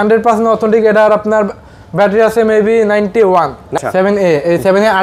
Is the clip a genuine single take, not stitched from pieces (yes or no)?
no